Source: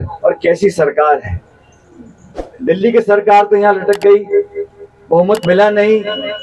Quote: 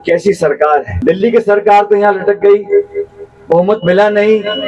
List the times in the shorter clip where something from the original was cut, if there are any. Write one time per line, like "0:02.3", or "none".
0:00.9